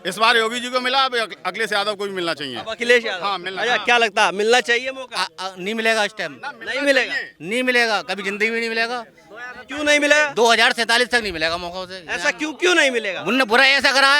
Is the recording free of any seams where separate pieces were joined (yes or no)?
yes